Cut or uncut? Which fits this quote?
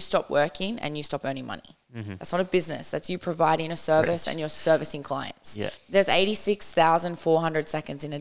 cut